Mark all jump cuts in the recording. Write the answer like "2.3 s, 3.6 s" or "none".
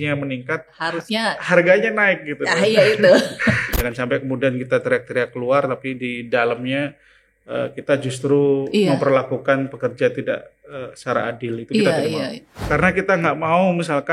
3.8 s, 12.6 s

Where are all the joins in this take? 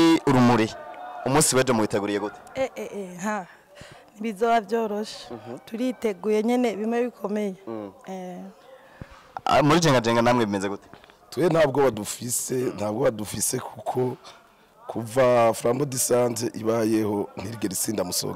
none

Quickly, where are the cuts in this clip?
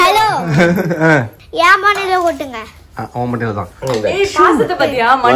1.4 s

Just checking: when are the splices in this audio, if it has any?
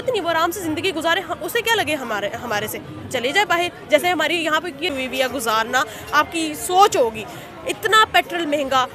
4.9 s

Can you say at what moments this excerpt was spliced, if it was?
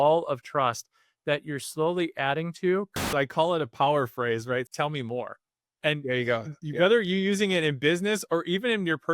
3.0 s, 4.7 s

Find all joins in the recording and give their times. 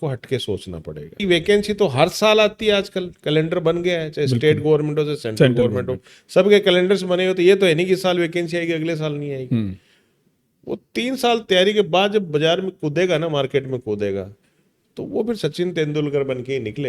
1.2 s

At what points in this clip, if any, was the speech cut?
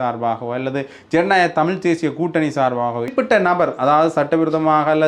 3.1 s

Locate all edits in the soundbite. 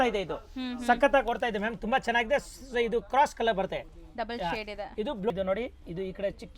5.3 s

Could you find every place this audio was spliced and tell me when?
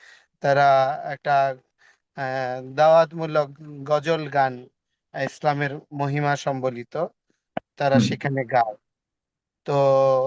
none

